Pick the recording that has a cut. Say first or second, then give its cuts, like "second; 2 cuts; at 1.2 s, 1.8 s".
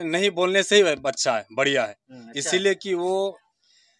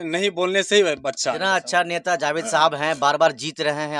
second; 1 cut; at 1.4 s